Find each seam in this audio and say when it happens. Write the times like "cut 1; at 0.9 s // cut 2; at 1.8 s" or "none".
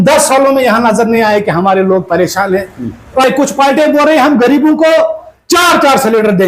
cut 1; at 3.4 s